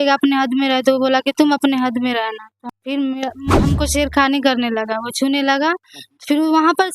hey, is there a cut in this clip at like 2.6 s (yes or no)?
yes